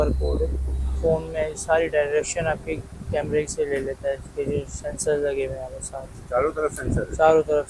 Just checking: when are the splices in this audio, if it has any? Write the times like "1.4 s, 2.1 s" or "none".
none